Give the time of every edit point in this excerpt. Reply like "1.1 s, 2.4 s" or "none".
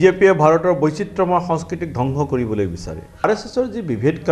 3.2 s